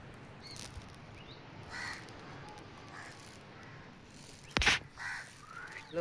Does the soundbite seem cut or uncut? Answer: uncut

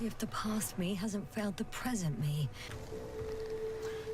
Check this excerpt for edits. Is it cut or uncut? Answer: cut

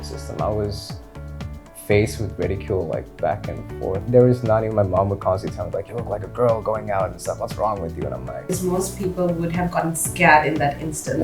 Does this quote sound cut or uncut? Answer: cut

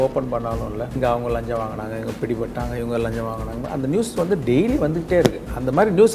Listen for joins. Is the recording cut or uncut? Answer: cut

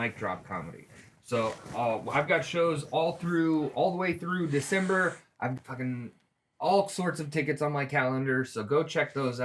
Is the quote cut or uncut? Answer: cut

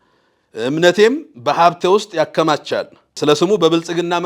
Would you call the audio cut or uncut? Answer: cut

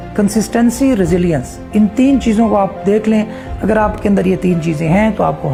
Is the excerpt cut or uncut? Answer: uncut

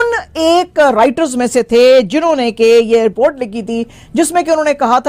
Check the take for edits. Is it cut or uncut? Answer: cut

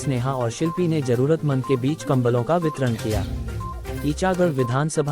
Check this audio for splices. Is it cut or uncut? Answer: uncut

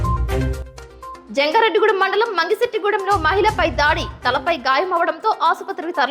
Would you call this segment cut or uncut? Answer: cut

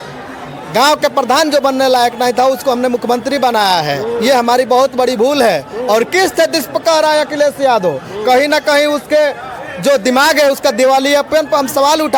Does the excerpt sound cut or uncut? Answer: uncut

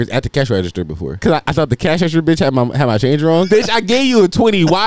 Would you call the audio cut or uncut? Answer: cut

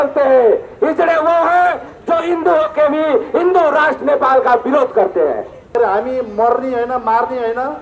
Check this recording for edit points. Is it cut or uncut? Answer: cut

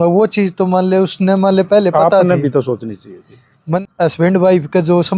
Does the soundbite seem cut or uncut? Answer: cut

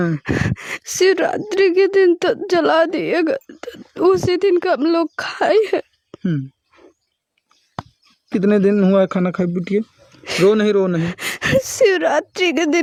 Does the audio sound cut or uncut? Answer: uncut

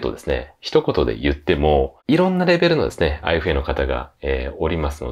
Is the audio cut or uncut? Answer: cut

